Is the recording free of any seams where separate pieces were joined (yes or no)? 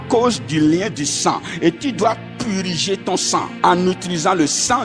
no